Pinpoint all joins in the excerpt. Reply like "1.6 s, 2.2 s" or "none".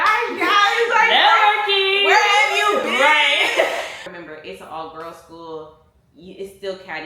4.1 s